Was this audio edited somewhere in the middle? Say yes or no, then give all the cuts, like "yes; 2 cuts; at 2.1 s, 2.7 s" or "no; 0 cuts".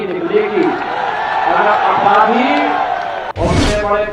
yes; 1 cut; at 3.2 s